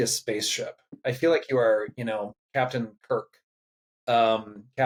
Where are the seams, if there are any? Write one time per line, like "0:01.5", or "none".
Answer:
none